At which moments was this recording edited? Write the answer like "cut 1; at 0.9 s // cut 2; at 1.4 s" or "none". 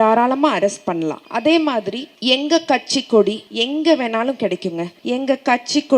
cut 1; at 1.2 s // cut 2; at 2.1 s // cut 3; at 3.5 s // cut 4; at 4.9 s